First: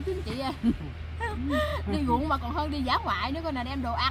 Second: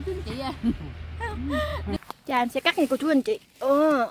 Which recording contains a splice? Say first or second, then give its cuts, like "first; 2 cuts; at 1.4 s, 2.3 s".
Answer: second; 1 cut; at 1.9 s